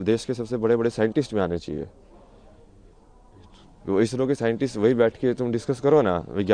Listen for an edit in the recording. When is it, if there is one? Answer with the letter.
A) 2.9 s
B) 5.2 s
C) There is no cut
C